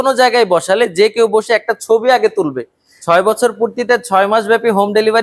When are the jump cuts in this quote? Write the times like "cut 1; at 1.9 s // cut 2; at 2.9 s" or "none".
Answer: cut 1; at 2.9 s